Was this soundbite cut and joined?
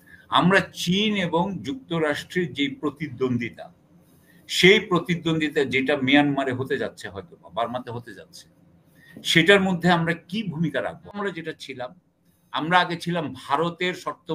yes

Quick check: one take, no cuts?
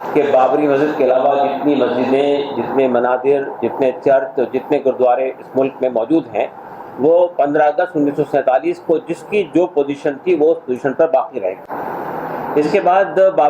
yes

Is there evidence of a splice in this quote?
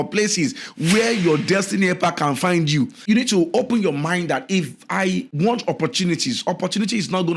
yes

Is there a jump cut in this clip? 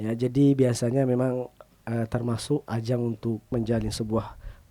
yes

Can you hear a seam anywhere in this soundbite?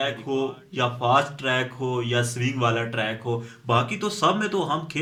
no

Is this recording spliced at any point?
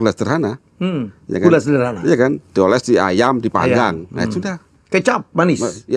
no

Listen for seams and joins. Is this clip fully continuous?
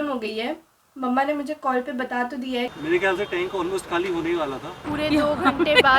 no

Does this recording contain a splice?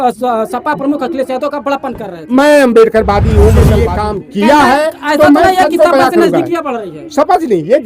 yes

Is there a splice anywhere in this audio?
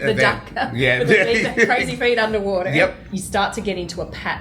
yes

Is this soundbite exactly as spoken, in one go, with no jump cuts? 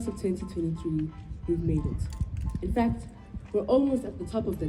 yes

